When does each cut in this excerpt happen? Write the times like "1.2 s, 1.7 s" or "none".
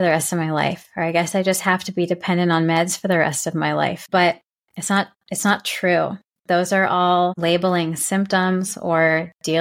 4.0 s, 7.4 s